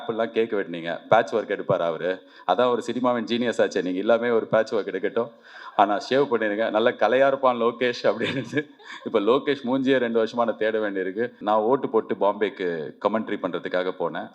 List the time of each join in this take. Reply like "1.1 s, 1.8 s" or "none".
11.4 s